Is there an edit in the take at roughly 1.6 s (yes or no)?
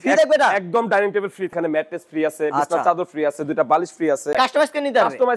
yes